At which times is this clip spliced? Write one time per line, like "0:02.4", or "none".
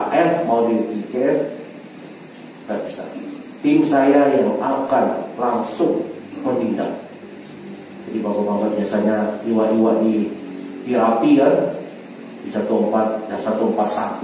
none